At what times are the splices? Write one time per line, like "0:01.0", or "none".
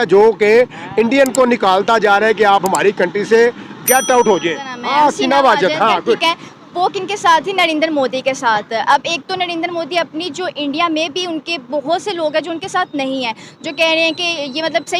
0:04.7